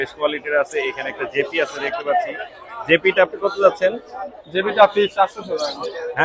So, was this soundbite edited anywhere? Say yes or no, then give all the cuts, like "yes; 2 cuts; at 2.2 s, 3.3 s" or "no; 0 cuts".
no; 0 cuts